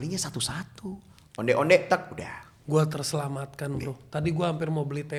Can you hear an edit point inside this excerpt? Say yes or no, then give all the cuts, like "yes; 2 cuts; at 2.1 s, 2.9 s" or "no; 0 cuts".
no; 0 cuts